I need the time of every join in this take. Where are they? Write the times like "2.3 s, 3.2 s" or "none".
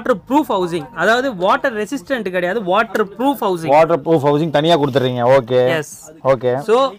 none